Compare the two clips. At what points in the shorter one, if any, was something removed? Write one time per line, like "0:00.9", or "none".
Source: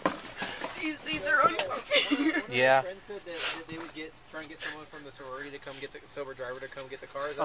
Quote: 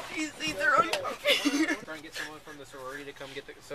0:01.8